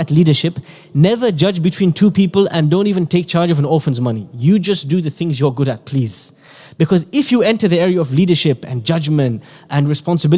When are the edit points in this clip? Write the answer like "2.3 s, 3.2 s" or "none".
none

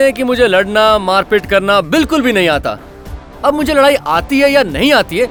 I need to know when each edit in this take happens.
none

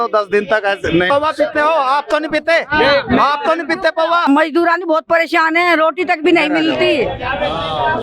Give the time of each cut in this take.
1.1 s, 4.2 s

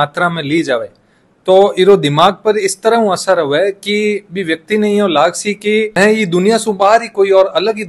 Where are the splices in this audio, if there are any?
none

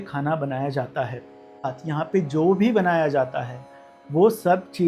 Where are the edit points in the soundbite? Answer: 1.8 s

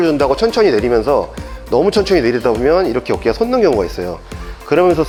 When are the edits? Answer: none

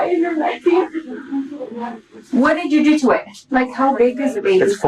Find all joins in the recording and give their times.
3.4 s

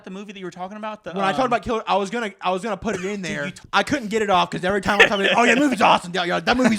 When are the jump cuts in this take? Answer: 3.6 s

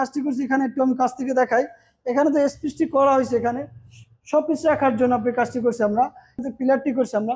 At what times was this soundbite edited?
6.4 s

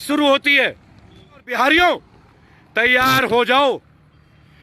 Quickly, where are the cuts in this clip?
1.5 s

